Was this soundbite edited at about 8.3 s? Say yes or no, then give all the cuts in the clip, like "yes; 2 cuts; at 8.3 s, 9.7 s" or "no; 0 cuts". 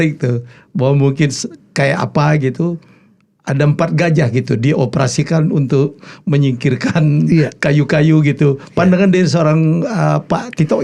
no; 0 cuts